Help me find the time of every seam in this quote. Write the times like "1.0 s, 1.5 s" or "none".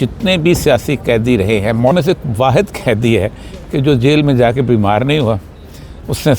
1.9 s